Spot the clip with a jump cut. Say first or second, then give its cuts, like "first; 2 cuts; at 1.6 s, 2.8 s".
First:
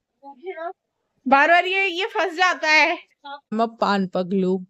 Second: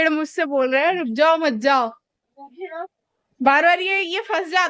first; 1 cut; at 3.5 s